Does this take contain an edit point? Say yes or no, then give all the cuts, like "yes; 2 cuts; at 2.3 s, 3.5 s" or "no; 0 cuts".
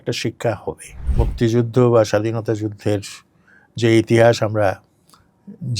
yes; 1 cut; at 1.2 s